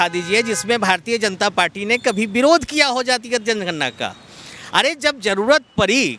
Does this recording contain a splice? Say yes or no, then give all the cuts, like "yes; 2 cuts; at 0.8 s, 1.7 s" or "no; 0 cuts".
no; 0 cuts